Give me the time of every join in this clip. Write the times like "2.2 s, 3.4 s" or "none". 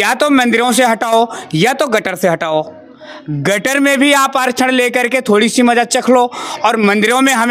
none